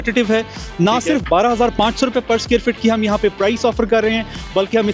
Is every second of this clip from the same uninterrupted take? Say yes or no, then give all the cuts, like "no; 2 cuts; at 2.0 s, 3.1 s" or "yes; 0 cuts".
yes; 0 cuts